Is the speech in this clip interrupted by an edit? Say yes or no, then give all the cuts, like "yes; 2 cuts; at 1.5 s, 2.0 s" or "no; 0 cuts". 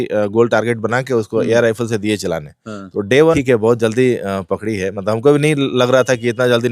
yes; 1 cut; at 3.4 s